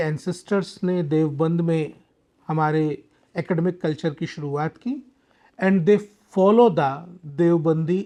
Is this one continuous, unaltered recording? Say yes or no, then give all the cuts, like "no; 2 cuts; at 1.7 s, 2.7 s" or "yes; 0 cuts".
yes; 0 cuts